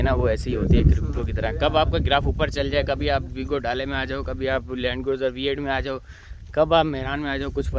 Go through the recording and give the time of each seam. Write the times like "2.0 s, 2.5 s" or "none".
none